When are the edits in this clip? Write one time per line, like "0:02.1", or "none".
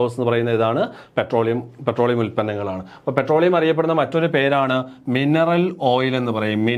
none